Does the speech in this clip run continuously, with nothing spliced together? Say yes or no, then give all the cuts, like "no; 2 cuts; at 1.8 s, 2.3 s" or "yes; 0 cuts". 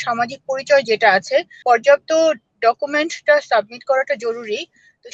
no; 1 cut; at 1.5 s